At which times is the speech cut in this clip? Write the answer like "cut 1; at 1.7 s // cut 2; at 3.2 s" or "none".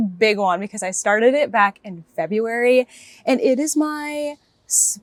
none